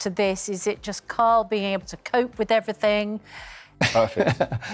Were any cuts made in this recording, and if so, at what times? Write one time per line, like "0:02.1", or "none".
0:03.8